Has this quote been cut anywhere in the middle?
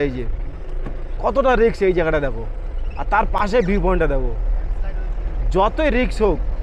no; 0 cuts

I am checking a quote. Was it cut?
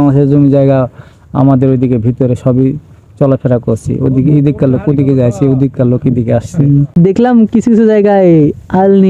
yes; 1 cut; at 7.0 s

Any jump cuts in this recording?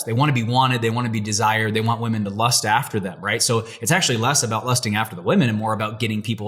no; 0 cuts

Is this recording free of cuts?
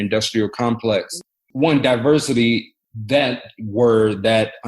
no; 1 cut; at 1.1 s

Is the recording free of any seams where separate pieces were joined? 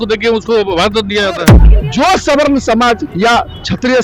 no; 1 cut; at 1.6 s

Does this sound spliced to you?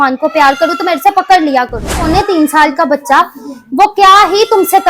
yes; 1 cut; at 2.1 s

